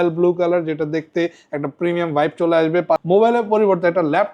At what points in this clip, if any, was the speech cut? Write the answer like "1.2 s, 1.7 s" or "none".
3.0 s